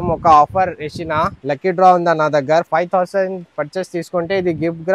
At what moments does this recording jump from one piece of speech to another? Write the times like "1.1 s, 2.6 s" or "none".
1.4 s, 2.7 s